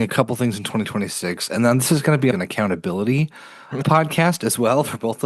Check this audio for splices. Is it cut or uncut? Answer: uncut